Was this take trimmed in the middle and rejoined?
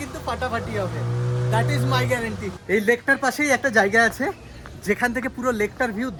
no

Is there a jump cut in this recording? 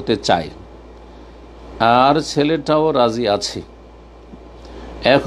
no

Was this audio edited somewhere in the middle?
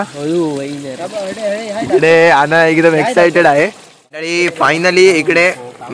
yes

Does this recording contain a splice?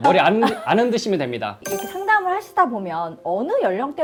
no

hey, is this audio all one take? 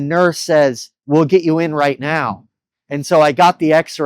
no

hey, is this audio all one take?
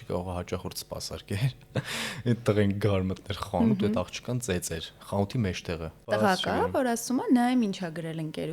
no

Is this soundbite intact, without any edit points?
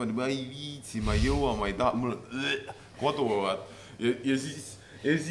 yes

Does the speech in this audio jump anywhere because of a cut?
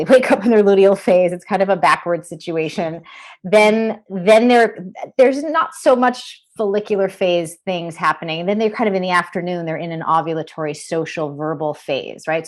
no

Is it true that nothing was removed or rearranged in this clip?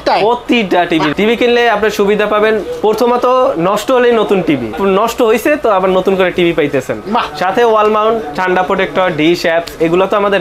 no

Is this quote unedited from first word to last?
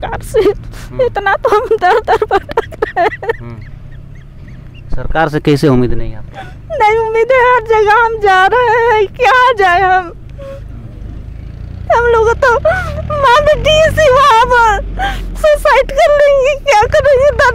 yes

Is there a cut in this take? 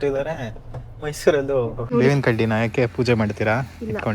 yes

